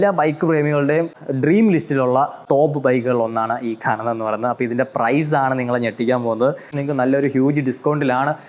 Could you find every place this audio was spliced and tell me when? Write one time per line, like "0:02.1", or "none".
0:01.2
0:02.4
0:06.7